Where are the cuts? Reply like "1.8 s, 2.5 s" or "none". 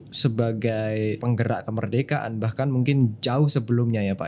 1.2 s